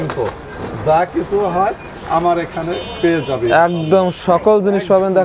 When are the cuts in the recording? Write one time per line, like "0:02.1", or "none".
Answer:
none